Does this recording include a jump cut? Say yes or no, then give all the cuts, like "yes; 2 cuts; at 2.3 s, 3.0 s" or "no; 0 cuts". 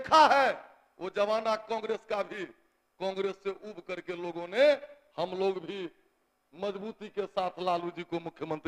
no; 0 cuts